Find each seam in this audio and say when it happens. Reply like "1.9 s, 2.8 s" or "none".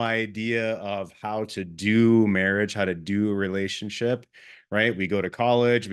none